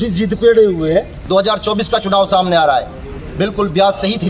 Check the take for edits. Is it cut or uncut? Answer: cut